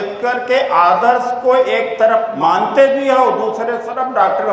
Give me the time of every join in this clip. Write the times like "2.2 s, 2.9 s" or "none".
2.3 s